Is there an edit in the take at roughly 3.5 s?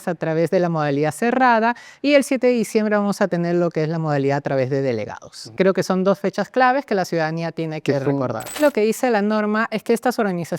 no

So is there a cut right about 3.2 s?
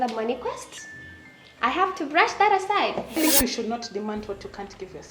yes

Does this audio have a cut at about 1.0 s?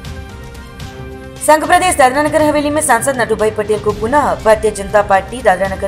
yes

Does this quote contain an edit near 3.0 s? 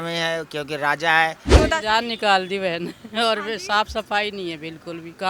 no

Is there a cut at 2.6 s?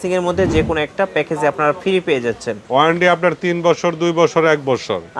yes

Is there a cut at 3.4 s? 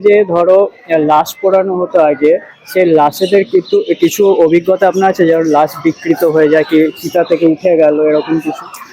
no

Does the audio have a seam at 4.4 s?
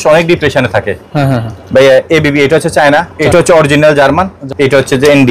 yes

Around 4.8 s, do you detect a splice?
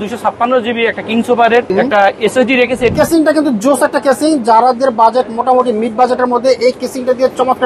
no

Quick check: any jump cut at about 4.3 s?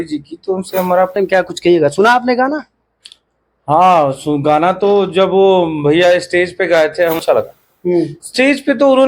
no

